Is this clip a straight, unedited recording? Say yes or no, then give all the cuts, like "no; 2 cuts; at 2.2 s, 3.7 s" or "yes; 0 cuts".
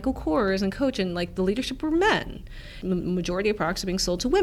no; 1 cut; at 2.7 s